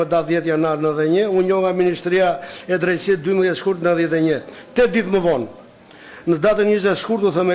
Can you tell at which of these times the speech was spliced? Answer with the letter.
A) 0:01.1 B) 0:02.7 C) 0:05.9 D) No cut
D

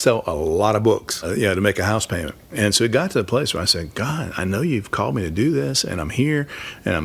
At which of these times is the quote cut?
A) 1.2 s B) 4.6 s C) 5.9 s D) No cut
A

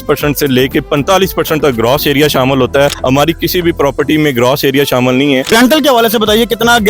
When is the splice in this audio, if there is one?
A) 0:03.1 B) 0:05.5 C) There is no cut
B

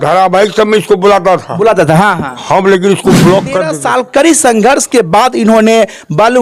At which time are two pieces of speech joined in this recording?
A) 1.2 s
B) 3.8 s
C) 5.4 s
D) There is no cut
B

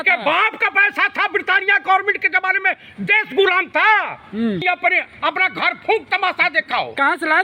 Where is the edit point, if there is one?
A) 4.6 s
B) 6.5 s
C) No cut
A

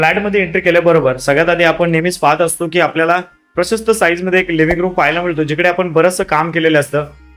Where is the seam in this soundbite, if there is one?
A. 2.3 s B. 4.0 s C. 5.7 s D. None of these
D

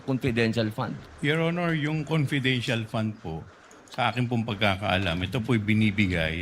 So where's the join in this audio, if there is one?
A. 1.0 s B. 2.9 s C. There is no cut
A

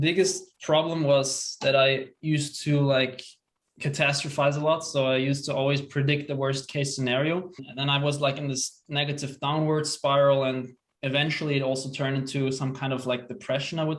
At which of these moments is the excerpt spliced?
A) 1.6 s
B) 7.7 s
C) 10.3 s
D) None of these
B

